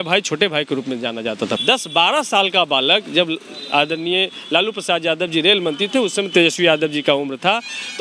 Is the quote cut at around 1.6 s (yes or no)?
yes